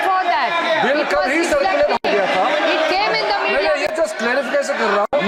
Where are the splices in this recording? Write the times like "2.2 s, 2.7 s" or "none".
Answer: none